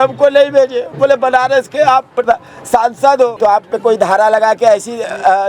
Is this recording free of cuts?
no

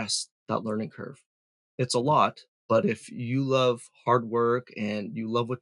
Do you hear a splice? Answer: yes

